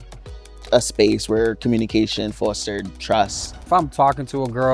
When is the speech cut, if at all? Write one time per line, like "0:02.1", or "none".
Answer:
0:03.6